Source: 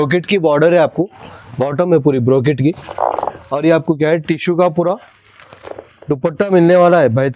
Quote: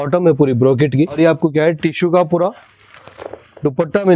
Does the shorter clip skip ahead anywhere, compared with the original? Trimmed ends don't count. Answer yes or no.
yes